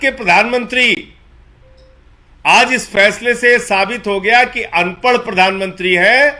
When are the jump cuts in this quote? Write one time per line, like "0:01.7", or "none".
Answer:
none